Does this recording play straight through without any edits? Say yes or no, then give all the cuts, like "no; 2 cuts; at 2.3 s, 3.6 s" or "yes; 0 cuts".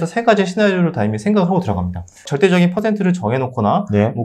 no; 1 cut; at 2.3 s